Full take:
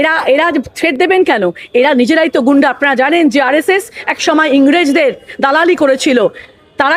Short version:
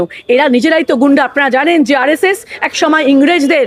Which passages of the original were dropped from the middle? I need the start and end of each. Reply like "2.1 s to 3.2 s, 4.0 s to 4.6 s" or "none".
none